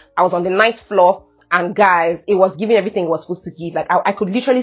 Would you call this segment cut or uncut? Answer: uncut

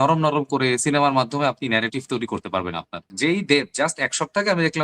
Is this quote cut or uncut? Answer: cut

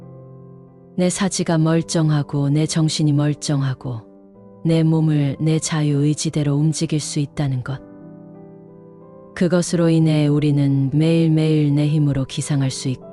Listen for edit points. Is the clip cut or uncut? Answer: uncut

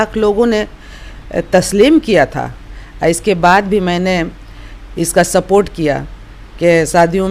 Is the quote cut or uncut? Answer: uncut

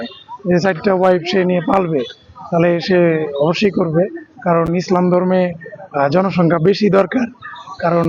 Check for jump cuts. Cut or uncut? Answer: uncut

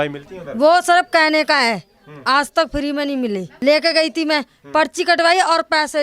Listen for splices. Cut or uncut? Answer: cut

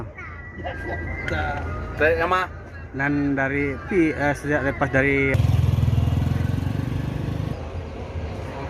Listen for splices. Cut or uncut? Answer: cut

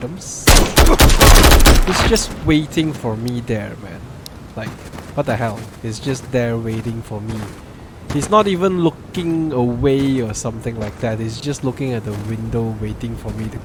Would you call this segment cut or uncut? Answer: uncut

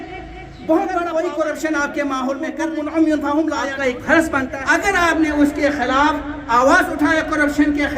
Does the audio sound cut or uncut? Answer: cut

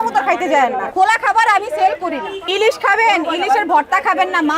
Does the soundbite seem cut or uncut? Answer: cut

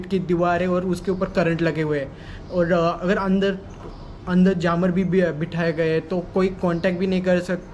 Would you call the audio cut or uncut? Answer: uncut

